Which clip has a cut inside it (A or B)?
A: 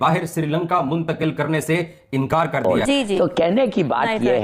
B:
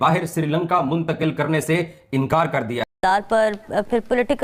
A